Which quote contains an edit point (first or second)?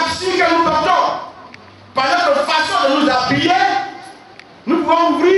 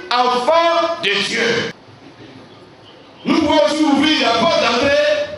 second